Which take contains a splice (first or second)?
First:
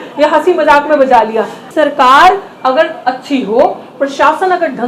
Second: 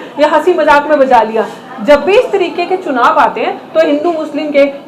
first